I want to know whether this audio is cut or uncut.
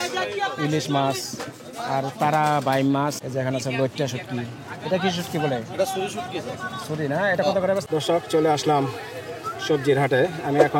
cut